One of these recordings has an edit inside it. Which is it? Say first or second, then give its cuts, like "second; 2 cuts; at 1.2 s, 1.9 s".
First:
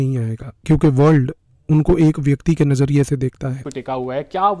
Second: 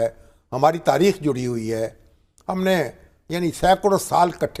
first; 1 cut; at 3.6 s